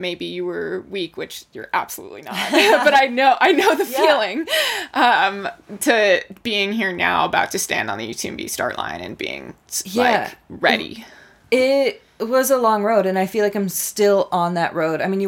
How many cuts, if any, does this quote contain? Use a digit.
0